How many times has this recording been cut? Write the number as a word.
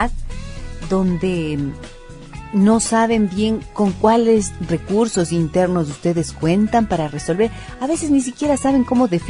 one